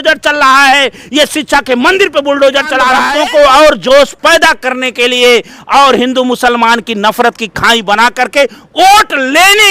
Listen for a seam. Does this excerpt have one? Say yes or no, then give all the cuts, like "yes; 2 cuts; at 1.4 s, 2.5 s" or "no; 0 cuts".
yes; 1 cut; at 3.0 s